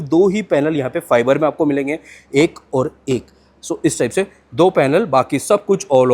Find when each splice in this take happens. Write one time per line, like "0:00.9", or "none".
none